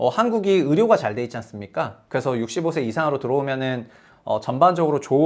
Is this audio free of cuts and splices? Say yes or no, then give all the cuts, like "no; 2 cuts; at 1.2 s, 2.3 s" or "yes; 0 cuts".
yes; 0 cuts